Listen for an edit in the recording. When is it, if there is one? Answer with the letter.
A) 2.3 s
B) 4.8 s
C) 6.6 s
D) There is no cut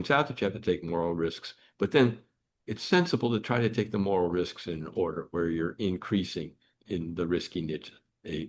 D